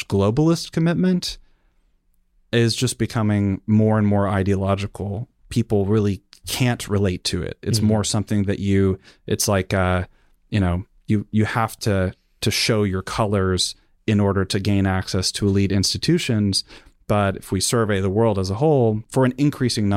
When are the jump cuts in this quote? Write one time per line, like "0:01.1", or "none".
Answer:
0:19.0